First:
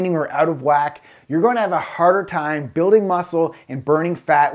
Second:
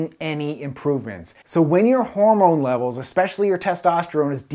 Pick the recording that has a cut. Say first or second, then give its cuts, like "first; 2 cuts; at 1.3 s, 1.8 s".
second; 1 cut; at 1.3 s